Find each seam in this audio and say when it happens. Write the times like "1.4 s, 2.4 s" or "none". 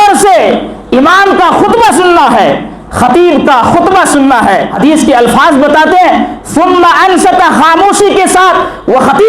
4.7 s

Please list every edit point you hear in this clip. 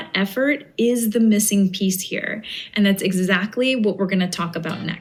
none

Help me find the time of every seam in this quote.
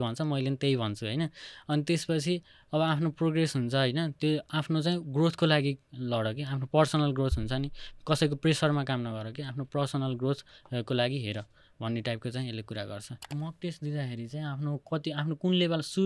13.4 s

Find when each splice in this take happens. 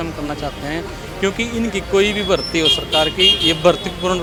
none

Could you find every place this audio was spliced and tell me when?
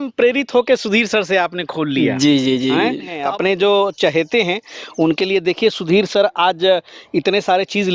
3.1 s

